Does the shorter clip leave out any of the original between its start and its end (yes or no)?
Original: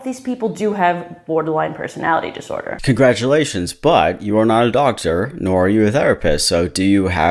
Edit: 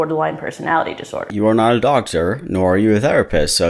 yes